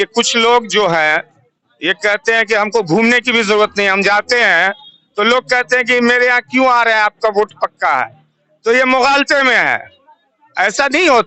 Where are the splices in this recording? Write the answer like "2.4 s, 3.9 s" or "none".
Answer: none